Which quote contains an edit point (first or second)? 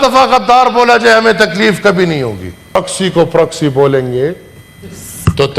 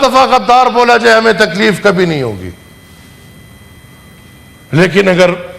first